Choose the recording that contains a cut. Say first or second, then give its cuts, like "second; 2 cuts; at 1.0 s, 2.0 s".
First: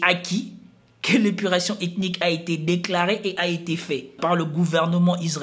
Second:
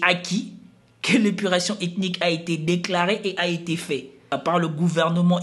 first; 1 cut; at 4.2 s